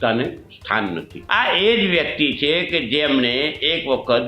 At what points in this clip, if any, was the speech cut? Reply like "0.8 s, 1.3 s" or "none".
1.1 s